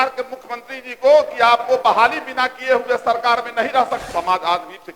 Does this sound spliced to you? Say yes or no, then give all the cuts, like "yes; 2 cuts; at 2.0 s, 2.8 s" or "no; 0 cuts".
yes; 1 cut; at 4.0 s